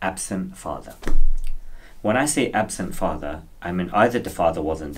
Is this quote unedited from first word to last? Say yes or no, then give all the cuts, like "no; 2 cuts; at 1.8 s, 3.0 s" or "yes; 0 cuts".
yes; 0 cuts